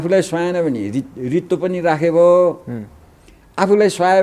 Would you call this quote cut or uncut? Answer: uncut